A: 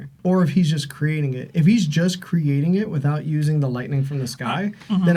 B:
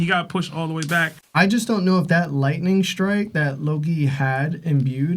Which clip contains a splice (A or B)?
B